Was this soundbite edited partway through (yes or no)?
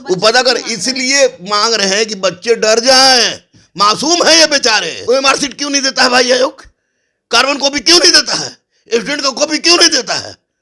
yes